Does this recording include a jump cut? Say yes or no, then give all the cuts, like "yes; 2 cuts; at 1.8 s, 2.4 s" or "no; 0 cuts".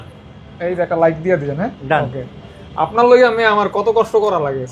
no; 0 cuts